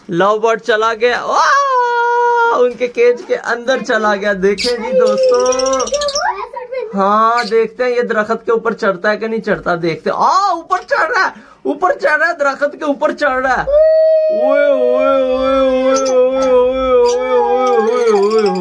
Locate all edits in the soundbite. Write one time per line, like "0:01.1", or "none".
none